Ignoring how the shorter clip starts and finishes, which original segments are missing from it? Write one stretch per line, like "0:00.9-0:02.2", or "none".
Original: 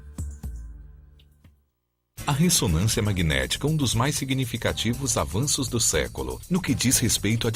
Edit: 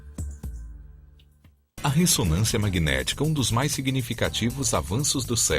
0:01.8-0:02.2